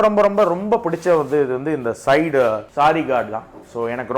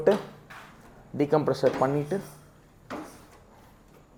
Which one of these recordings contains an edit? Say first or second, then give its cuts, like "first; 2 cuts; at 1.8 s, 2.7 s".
first; 1 cut; at 2.7 s